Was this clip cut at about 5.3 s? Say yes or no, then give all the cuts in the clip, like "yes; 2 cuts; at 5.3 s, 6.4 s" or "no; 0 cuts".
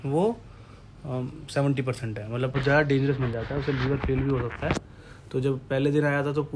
no; 1 cut; at 2.6 s